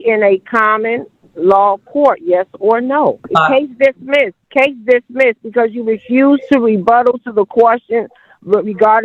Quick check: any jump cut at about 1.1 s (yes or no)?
no